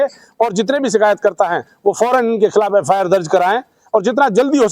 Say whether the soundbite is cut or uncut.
uncut